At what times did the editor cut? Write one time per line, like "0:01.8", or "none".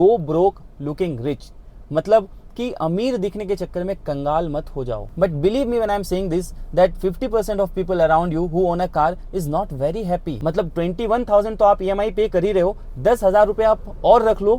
0:05.2
0:10.3

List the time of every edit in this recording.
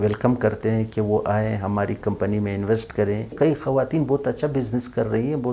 0:03.3

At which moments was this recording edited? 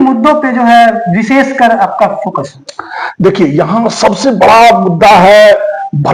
none

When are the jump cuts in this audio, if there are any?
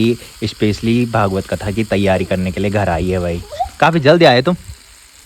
none

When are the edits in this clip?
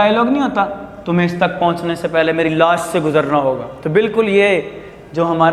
none

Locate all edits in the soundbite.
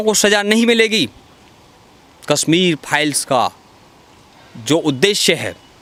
none

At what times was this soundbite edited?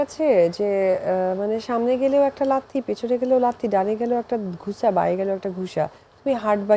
none

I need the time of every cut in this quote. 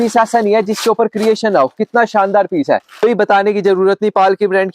0:03.0

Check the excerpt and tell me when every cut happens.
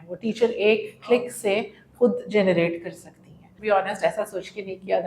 0:03.5

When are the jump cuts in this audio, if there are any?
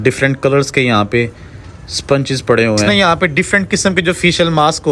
0:02.9

